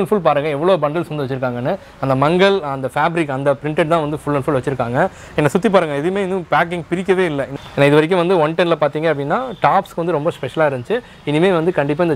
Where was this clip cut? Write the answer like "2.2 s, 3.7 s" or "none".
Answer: 7.5 s